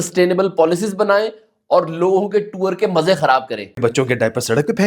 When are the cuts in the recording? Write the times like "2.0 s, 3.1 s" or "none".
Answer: 3.8 s